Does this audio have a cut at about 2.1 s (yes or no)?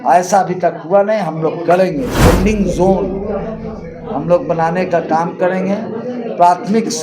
yes